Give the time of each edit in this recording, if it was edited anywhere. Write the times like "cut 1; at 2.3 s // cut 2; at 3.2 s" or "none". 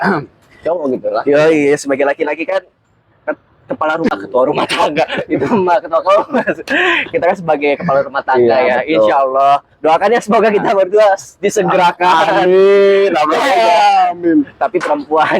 cut 1; at 4.1 s